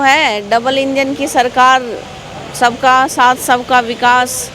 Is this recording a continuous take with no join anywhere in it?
yes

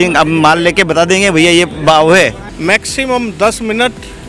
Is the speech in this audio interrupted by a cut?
yes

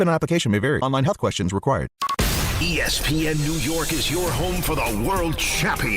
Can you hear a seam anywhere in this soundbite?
yes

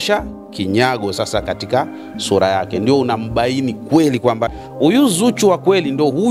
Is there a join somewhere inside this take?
yes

